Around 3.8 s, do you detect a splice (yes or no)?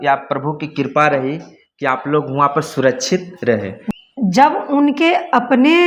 yes